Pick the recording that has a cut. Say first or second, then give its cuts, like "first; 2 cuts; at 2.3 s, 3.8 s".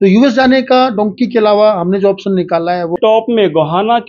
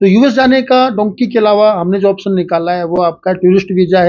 first; 1 cut; at 3.0 s